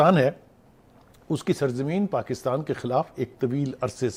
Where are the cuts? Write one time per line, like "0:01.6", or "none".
none